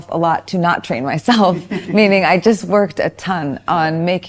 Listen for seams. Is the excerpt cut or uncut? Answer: uncut